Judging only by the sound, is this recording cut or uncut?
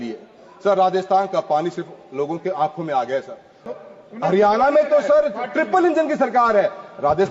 cut